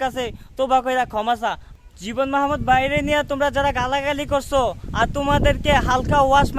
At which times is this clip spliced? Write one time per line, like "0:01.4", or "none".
0:01.7